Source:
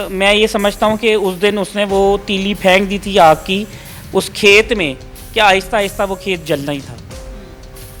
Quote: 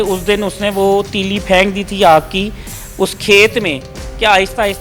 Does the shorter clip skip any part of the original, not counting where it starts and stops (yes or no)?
no